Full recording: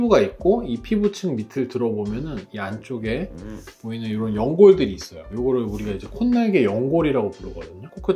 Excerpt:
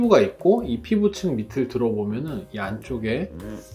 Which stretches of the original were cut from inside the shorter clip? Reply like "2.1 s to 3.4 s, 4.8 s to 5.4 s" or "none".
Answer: none